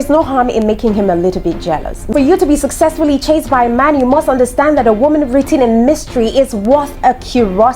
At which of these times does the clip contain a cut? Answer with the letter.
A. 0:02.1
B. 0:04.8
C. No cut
A